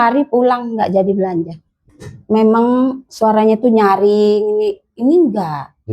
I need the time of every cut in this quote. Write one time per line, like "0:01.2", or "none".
0:01.8